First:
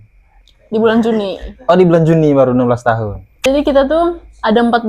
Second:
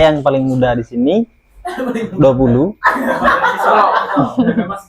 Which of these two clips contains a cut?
first; 1 cut; at 3.3 s

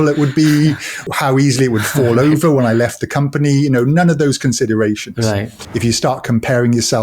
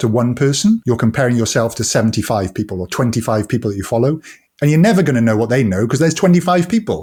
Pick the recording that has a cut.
first; 2 cuts; at 1.0 s, 5.6 s

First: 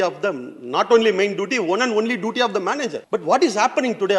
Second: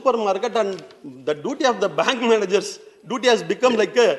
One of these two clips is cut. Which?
first; 1 cut; at 3.0 s

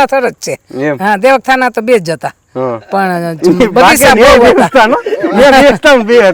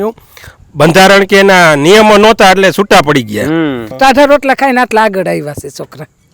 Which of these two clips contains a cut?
second; 1 cut; at 3.9 s

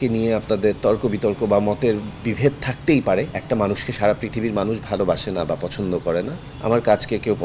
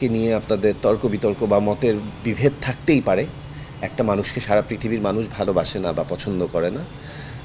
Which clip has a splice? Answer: first; 2 cuts; at 3.4 s, 6.4 s

